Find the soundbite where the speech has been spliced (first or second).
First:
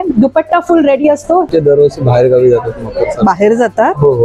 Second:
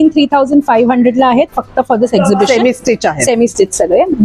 first